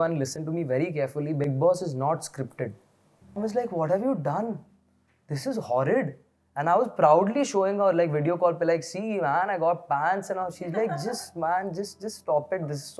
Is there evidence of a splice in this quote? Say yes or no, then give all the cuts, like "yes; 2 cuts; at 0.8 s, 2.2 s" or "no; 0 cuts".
yes; 1 cut; at 3.4 s